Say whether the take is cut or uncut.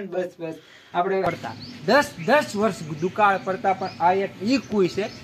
cut